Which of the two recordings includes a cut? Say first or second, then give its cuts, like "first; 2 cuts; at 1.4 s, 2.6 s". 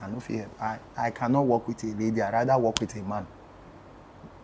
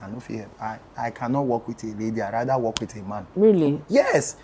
second; 1 cut; at 3.2 s